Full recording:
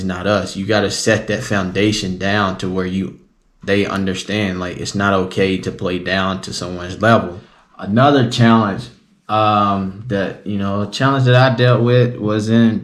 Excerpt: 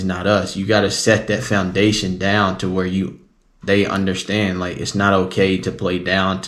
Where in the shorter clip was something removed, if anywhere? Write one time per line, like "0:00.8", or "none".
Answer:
none